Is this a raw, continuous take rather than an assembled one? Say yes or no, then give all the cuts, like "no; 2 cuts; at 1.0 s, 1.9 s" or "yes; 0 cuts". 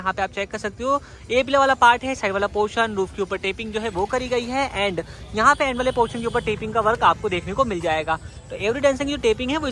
yes; 0 cuts